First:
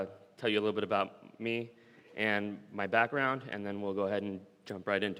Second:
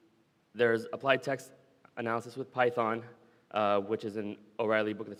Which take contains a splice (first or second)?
first